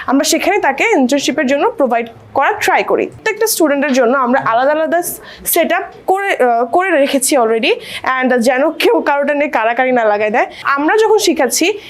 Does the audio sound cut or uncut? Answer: cut